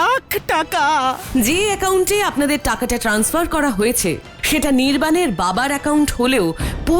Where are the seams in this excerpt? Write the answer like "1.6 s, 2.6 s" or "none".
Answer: 1.2 s

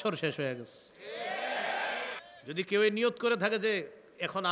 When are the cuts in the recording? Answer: 2.3 s

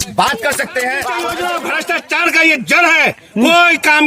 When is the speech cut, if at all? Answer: 1.3 s

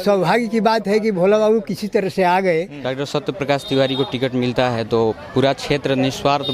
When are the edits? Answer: 2.9 s

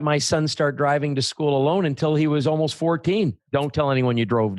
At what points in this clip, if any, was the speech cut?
3.4 s

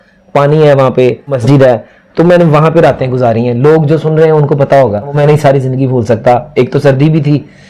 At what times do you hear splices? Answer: 1.3 s, 5.1 s

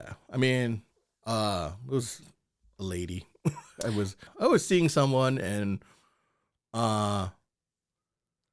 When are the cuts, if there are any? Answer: 4.2 s

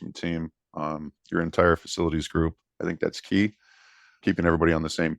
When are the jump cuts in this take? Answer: 4.2 s

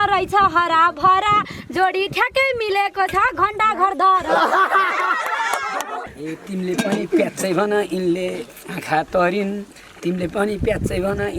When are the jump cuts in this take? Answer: 6.1 s

